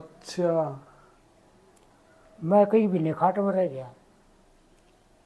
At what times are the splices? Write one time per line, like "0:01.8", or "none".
none